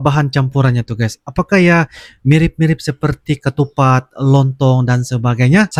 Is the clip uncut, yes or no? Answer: yes